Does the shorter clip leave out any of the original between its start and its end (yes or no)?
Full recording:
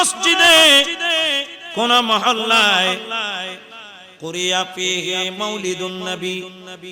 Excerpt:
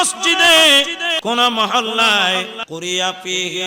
yes